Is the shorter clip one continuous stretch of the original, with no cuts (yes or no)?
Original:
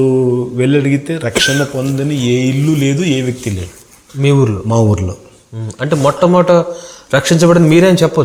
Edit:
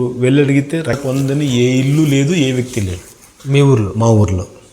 no